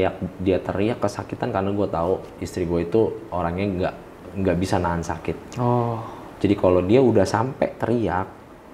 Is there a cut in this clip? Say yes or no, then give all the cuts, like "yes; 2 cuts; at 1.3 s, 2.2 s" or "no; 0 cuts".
no; 0 cuts